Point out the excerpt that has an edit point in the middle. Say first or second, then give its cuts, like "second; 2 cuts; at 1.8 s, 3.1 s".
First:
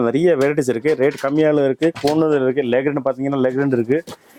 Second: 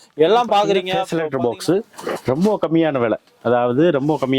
second; 1 cut; at 1.0 s